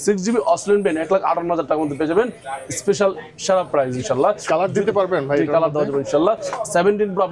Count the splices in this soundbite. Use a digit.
0